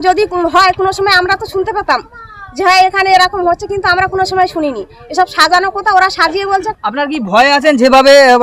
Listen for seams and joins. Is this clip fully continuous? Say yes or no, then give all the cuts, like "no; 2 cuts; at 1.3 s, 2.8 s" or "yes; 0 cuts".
yes; 0 cuts